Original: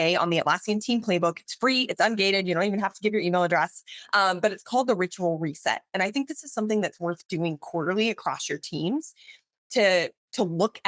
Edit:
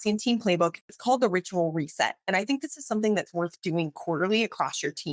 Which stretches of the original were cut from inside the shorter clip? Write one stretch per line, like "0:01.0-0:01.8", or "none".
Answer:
0:01.5-0:04.6